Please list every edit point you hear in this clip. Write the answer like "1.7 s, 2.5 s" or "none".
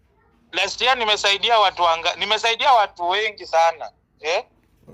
none